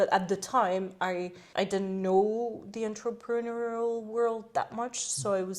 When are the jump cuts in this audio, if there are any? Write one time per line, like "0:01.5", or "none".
0:01.4

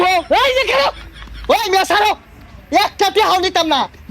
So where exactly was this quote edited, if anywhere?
0:01.0

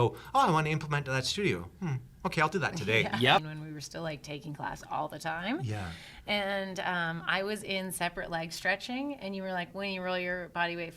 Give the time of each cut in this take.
0:03.5

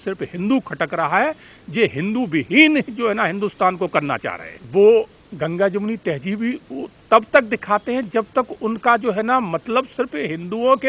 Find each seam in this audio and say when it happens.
0:04.5

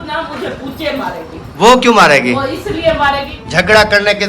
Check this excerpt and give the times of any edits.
0:03.4

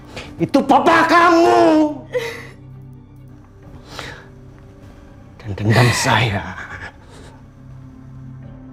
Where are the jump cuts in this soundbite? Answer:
none

